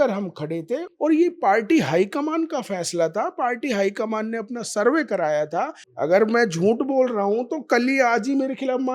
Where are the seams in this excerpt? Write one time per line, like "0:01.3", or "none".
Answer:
0:00.9
0:05.8